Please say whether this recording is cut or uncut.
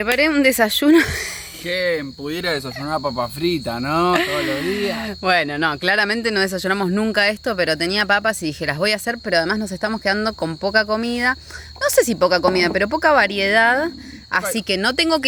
uncut